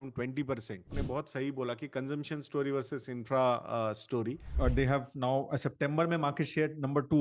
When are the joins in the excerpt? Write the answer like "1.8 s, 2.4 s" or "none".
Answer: 0.9 s, 4.5 s